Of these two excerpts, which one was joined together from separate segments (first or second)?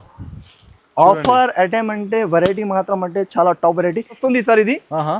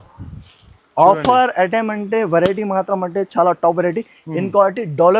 first